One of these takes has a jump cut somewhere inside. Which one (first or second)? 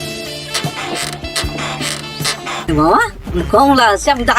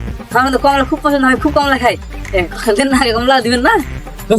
first